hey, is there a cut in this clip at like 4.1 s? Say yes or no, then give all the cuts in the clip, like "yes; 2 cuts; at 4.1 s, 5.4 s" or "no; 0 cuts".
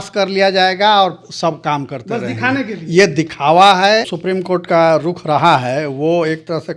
yes; 1 cut; at 4.1 s